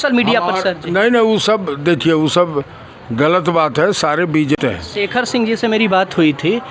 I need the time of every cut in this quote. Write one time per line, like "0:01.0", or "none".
0:04.6